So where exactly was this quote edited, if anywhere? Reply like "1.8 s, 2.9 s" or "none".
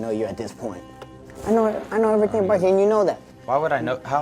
3.3 s